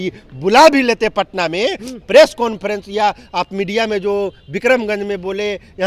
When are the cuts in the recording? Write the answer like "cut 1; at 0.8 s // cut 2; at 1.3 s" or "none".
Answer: none